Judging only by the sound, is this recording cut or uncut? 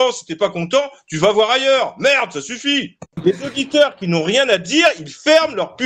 cut